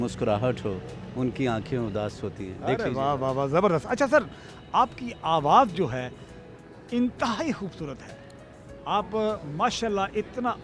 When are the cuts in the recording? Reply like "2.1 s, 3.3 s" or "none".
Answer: none